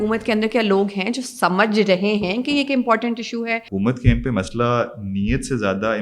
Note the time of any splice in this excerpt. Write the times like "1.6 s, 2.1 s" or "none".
3.7 s